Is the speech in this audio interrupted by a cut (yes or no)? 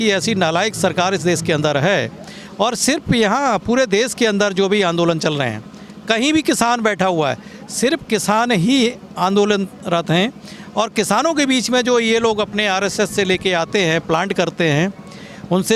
no